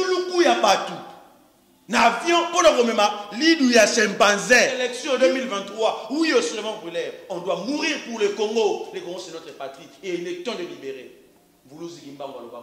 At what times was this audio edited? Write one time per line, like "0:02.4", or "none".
0:04.9